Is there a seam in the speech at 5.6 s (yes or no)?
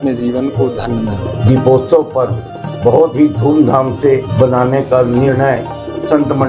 no